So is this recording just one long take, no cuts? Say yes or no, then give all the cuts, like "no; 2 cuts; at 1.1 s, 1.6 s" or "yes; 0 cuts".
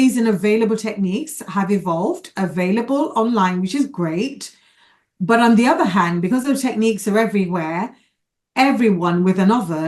yes; 0 cuts